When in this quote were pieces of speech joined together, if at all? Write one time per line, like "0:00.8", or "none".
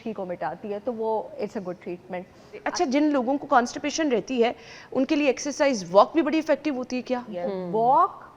0:02.6
0:07.3